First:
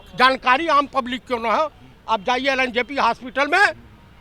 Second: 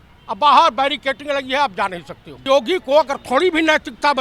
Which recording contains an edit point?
second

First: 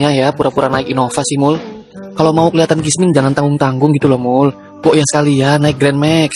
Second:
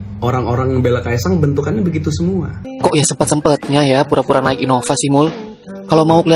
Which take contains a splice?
second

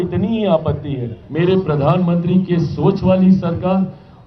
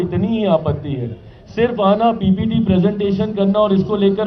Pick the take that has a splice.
first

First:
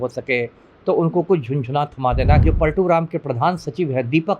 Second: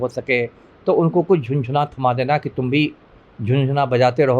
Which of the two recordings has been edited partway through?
first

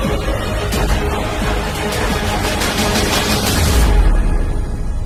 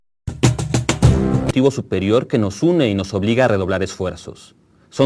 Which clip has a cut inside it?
second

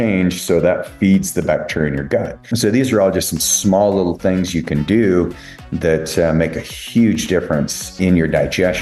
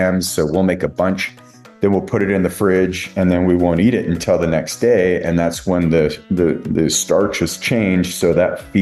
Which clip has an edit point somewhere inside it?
first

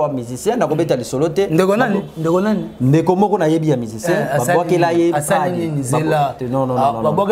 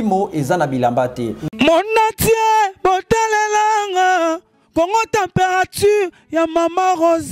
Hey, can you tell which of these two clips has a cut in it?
second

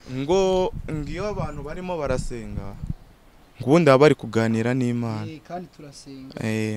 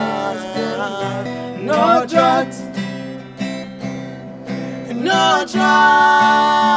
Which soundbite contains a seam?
second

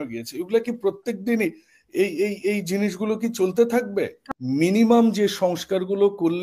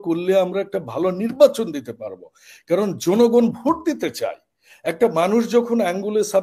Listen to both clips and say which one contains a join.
first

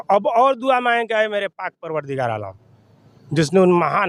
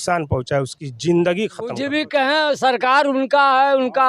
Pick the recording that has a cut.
second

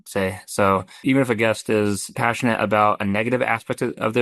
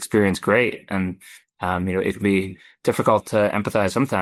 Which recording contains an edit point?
first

